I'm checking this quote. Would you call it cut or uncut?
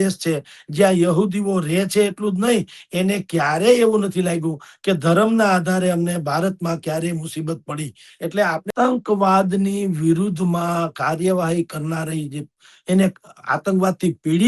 cut